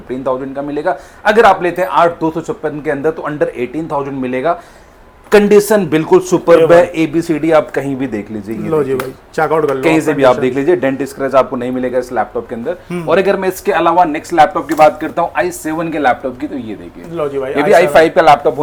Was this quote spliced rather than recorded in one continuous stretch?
no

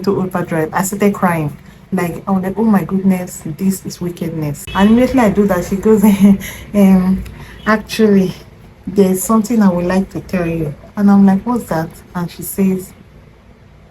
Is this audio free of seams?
no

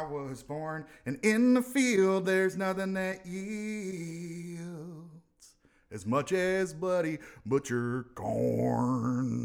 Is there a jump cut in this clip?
no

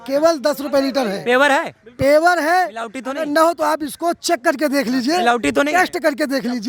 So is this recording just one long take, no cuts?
yes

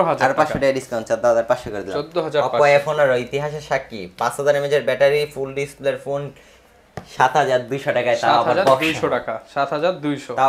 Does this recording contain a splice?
no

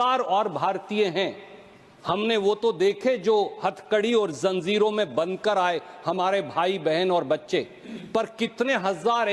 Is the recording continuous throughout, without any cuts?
yes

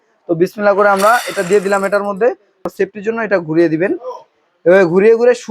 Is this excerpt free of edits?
no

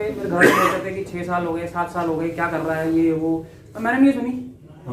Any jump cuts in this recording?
no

